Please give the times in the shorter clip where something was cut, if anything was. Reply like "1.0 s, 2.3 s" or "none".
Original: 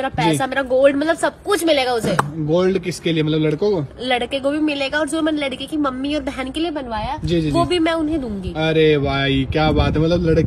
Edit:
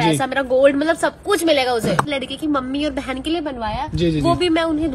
2.1 s